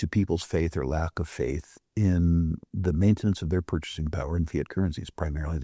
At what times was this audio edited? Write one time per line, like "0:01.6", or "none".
none